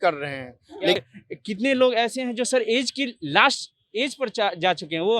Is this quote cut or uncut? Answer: cut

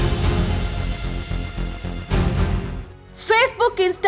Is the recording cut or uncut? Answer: cut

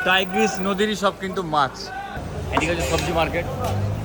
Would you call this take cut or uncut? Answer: cut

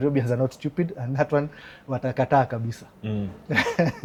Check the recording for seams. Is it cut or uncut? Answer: uncut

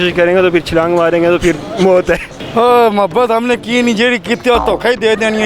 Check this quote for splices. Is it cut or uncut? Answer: cut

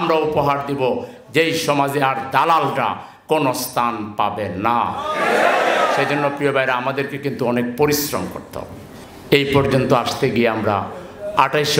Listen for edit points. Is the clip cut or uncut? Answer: uncut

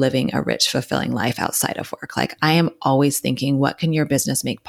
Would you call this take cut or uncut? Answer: uncut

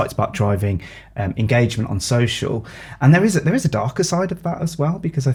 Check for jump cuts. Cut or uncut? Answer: uncut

